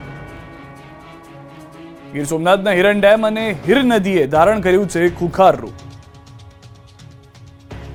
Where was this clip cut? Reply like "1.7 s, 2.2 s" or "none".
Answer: none